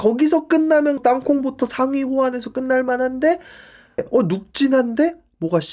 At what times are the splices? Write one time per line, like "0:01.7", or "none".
0:01.0
0:04.0